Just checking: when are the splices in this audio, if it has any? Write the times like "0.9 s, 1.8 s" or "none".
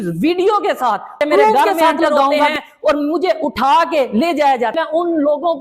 2.6 s, 4.7 s